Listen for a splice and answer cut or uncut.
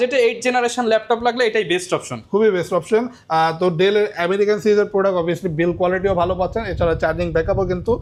uncut